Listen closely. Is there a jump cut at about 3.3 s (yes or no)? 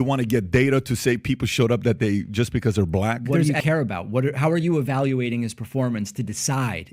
yes